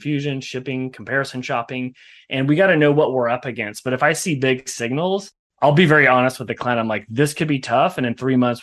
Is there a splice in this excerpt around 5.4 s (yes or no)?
yes